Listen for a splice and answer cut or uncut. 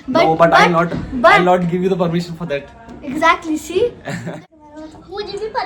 cut